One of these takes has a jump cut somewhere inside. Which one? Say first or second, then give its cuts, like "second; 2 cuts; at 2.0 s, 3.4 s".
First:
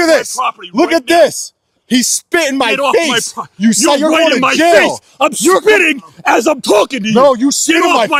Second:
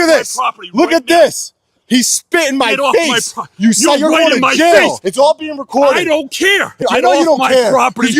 second; 2 cuts; at 5.0 s, 6.8 s